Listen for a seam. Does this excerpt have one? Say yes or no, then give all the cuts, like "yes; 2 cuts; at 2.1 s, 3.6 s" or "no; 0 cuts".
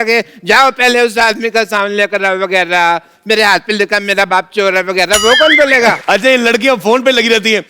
yes; 1 cut; at 6.0 s